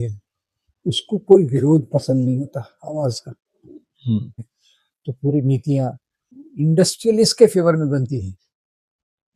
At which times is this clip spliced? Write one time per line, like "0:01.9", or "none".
0:04.4
0:06.4